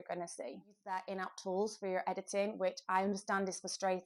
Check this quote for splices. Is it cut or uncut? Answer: cut